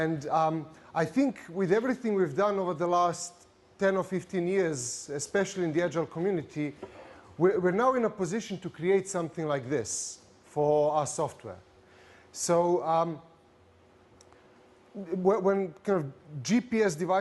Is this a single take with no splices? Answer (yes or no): no